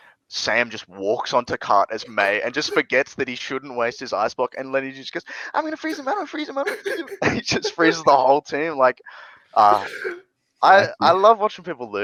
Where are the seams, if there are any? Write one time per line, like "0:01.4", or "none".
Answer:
none